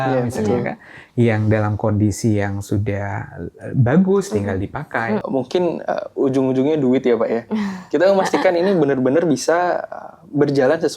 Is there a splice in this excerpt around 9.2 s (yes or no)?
no